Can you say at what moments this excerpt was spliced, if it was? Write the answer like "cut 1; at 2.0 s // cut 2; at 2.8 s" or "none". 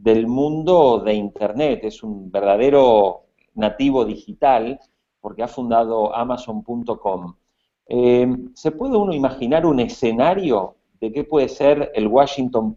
none

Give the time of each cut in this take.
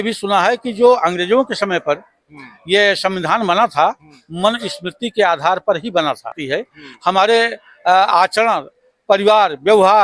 cut 1; at 6.4 s

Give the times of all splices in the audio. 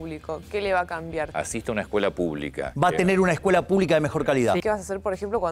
cut 1; at 1.3 s // cut 2; at 2.6 s // cut 3; at 4.6 s

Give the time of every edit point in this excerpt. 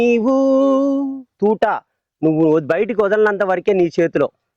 cut 1; at 1.3 s

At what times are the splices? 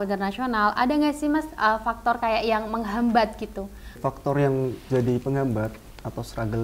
cut 1; at 4.0 s

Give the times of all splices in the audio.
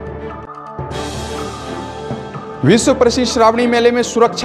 none

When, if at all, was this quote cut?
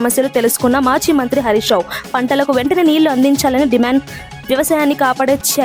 none

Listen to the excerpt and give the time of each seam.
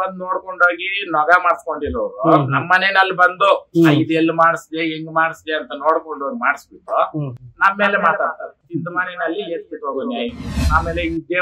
cut 1; at 8.6 s // cut 2; at 10.5 s

